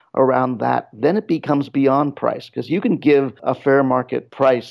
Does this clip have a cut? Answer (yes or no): yes